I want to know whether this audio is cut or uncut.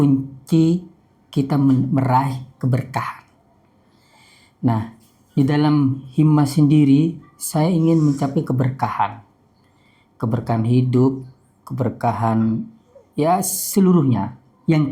uncut